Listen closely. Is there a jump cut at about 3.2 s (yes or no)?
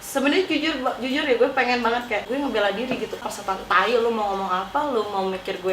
yes